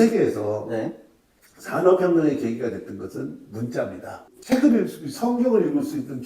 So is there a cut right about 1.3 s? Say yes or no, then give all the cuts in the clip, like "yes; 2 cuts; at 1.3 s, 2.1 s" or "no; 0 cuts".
no; 1 cut; at 4.3 s